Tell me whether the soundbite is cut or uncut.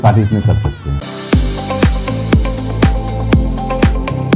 cut